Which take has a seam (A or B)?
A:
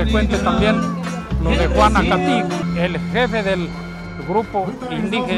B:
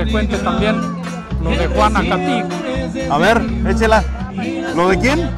A